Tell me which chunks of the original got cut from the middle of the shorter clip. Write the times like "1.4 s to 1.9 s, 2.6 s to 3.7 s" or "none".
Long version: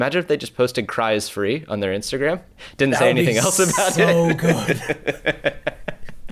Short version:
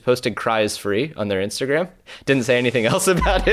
none